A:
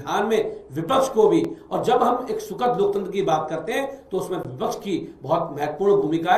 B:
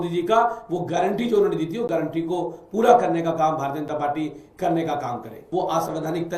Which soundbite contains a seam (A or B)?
B